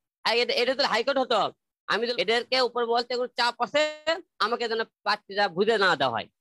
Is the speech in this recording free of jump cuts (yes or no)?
no